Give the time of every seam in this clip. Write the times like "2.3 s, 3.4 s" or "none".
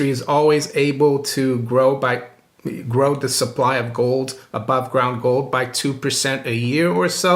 none